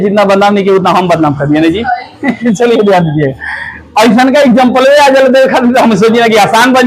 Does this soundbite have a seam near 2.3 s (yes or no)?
no